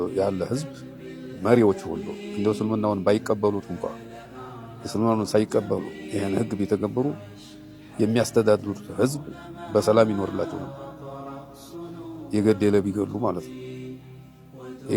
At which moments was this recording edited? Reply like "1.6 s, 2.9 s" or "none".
none